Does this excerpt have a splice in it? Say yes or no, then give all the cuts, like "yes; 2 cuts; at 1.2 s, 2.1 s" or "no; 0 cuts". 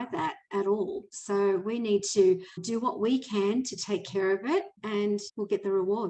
yes; 2 cuts; at 2.6 s, 4.8 s